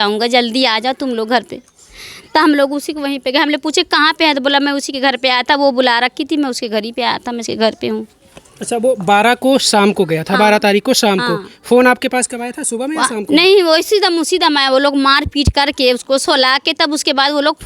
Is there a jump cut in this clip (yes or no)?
no